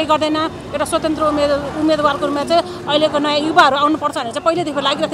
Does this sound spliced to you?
no; 0 cuts

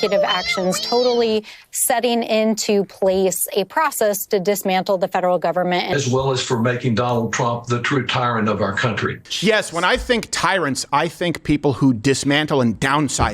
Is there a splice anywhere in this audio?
yes; 1 cut; at 9.2 s

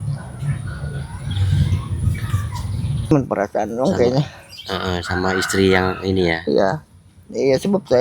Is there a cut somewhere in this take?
yes; 1 cut; at 3.1 s

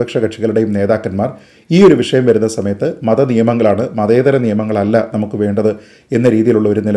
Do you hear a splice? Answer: no; 0 cuts

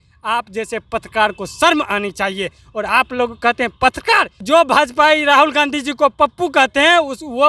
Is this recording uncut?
no; 1 cut; at 4.4 s

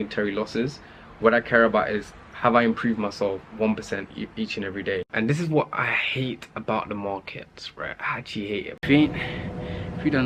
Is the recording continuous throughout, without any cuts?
no; 2 cuts; at 5.1 s, 8.8 s

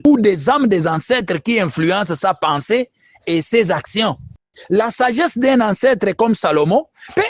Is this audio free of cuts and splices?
yes; 0 cuts

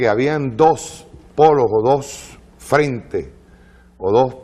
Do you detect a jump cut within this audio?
yes; 1 cut; at 2.5 s

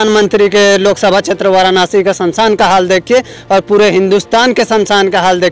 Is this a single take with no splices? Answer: yes; 0 cuts

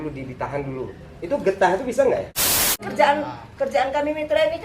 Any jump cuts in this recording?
yes; 1 cut; at 2.8 s

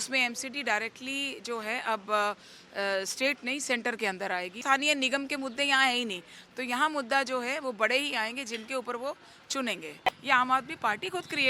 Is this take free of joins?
no; 2 cuts; at 4.6 s, 10.1 s

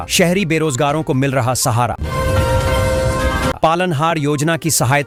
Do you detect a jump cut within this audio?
no; 0 cuts

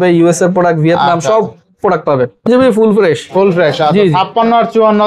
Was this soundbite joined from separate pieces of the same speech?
yes; 1 cut; at 2.5 s

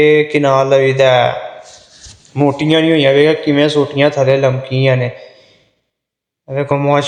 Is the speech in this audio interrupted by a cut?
no; 0 cuts

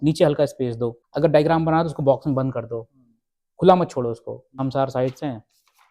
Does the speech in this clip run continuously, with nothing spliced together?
no; 2 cuts; at 1.0 s, 4.6 s

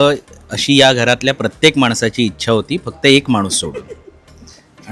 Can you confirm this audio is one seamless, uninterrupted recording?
yes; 0 cuts

